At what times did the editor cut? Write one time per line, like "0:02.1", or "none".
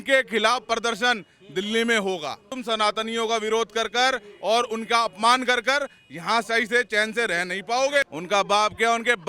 0:02.5
0:08.1